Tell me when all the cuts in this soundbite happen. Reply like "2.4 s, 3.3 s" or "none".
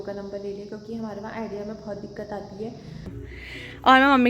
3.2 s